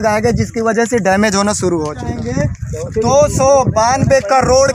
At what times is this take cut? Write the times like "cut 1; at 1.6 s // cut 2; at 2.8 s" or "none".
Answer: cut 1; at 2.1 s